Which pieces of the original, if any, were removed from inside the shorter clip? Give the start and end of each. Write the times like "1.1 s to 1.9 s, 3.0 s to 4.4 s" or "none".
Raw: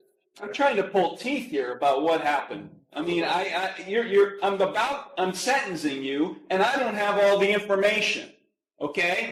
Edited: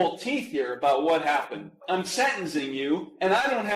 2.8 s to 5.1 s